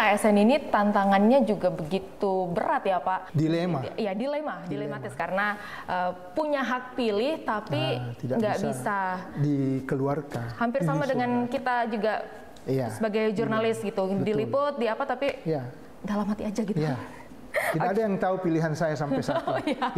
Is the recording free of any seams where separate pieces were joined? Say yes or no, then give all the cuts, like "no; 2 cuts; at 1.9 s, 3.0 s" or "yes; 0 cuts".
no; 2 cuts; at 3.3 s, 5.2 s